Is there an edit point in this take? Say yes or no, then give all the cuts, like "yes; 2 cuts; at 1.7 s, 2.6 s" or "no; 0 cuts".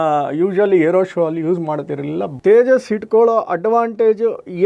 yes; 1 cut; at 2.3 s